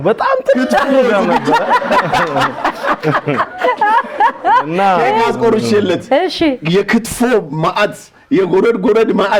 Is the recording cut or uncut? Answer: uncut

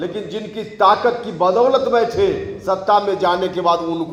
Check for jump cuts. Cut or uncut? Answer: uncut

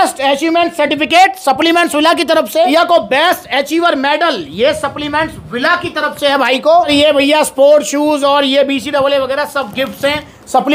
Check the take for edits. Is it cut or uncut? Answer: cut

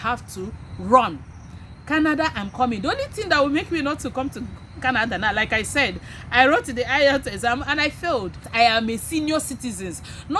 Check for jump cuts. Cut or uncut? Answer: cut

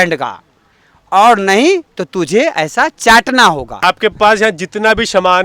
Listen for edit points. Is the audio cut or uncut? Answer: cut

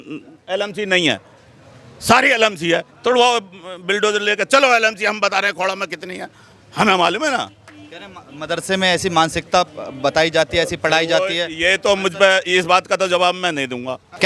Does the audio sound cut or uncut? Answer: uncut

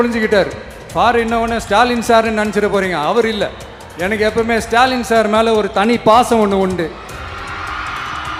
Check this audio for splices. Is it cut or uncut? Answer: uncut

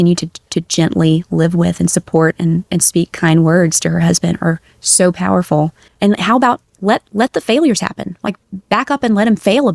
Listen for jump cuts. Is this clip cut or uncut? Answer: cut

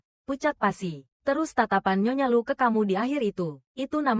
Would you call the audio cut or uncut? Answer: cut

